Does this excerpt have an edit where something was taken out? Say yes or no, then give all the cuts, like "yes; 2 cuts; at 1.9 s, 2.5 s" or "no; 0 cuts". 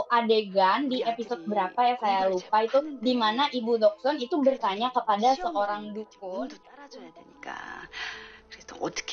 no; 0 cuts